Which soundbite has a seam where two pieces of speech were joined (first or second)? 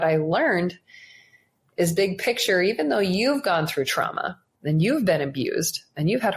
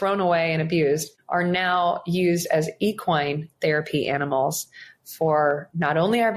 second